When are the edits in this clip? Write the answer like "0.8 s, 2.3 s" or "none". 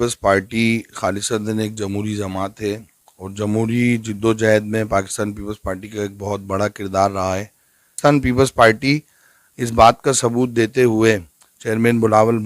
7.9 s